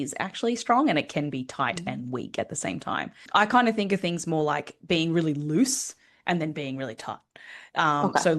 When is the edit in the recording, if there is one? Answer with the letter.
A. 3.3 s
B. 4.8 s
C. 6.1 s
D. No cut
A